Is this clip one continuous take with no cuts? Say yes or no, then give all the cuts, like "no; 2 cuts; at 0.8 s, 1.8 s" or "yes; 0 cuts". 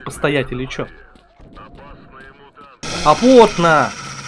no; 1 cut; at 2.8 s